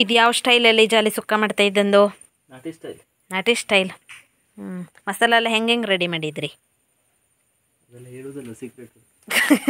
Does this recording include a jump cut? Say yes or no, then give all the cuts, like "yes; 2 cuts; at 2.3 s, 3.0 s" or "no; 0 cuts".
no; 0 cuts